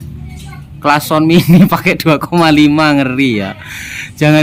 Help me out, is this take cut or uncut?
uncut